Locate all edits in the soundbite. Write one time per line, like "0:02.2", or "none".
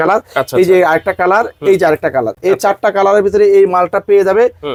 none

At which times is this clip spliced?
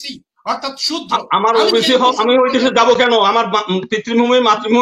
none

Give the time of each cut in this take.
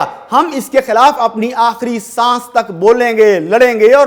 none

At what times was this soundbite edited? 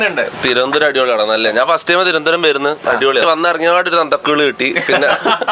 0:03.2

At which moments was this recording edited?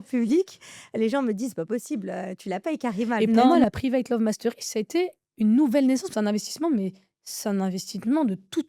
0:03.5
0:06.1

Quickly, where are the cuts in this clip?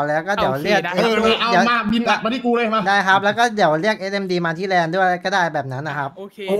none

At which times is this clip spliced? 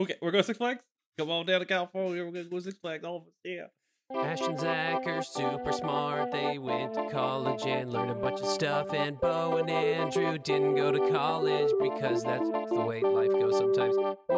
0:04.1

